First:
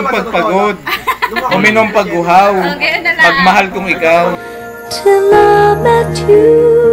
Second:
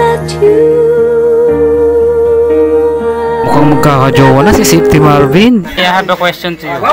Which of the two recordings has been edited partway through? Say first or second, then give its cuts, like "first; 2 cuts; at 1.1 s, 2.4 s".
second; 1 cut; at 5.8 s